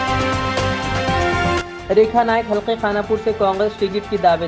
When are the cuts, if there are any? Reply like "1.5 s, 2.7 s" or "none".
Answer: 1.7 s